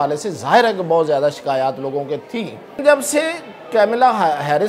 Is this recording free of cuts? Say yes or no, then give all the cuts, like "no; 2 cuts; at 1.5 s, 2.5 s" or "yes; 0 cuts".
no; 1 cut; at 2.8 s